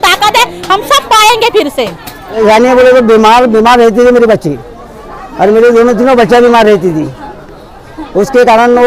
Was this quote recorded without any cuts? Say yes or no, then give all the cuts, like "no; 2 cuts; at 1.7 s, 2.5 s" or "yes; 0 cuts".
no; 1 cut; at 2.4 s